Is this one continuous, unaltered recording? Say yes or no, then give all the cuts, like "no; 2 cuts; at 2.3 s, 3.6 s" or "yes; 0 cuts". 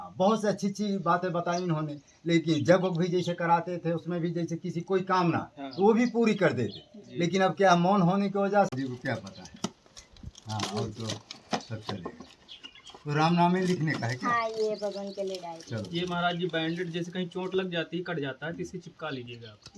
no; 1 cut; at 8.7 s